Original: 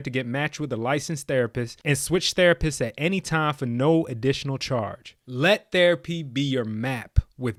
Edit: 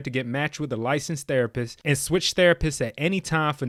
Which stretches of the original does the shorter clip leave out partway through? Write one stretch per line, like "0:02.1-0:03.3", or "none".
none